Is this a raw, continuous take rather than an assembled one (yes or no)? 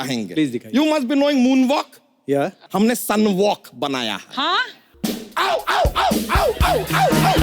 no